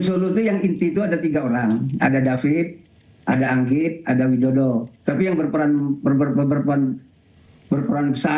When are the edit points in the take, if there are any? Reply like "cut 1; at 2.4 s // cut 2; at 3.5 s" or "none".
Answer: none